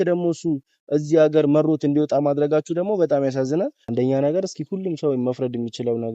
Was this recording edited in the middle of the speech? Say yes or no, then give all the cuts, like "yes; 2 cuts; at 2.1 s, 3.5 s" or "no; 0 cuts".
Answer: yes; 1 cut; at 3.8 s